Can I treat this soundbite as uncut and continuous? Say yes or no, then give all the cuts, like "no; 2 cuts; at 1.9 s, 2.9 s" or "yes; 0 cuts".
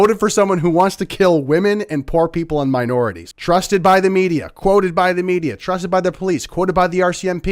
no; 1 cut; at 3.3 s